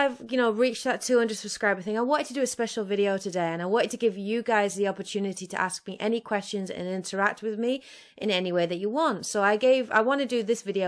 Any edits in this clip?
no; 0 cuts

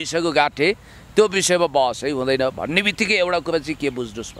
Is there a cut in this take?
no; 0 cuts

